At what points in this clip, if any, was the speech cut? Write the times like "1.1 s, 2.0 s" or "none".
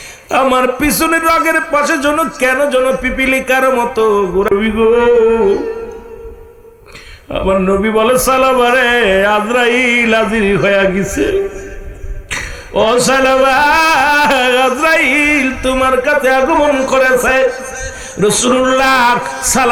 none